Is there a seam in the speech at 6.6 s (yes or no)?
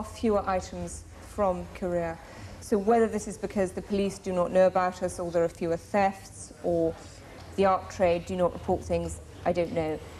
no